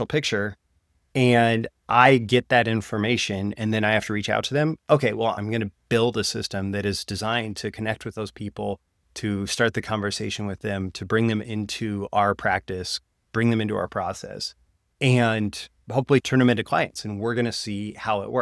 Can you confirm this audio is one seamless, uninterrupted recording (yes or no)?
no